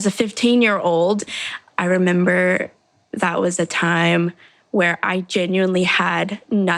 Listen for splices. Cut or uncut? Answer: cut